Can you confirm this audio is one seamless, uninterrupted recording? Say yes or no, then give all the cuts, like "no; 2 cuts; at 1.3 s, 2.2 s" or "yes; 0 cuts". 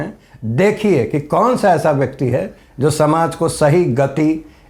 yes; 0 cuts